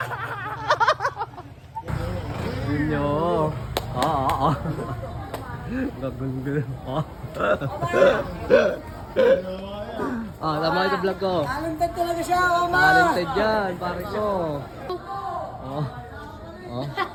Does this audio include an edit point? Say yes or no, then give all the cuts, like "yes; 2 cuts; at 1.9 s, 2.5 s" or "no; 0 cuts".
no; 0 cuts